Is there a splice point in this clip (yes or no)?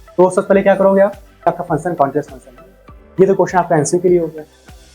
yes